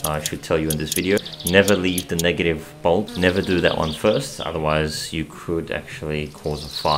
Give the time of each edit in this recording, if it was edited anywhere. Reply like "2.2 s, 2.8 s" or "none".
1.2 s, 3.1 s